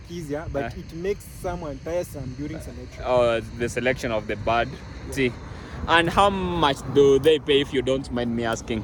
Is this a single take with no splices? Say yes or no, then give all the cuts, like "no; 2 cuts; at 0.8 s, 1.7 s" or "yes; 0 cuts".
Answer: yes; 0 cuts